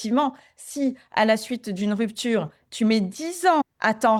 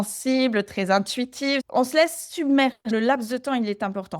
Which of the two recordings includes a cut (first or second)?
second